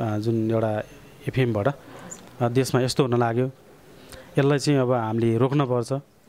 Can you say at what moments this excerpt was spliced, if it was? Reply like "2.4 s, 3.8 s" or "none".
none